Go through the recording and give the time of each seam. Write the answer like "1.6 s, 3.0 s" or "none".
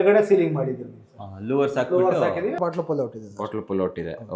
2.6 s